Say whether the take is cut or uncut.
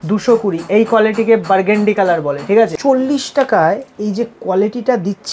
cut